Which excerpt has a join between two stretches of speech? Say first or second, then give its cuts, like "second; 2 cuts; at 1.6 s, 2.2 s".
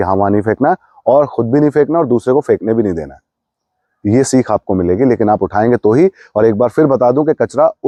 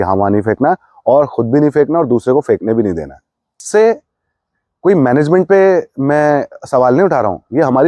second; 1 cut; at 3.6 s